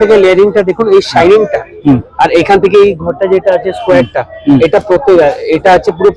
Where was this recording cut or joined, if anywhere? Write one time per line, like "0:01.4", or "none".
none